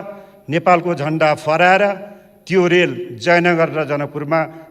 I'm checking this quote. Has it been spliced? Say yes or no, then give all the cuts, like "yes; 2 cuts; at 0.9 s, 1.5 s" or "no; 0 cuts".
no; 0 cuts